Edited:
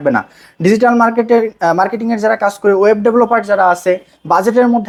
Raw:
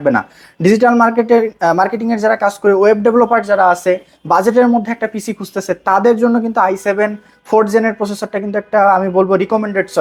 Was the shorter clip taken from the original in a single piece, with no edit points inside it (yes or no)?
yes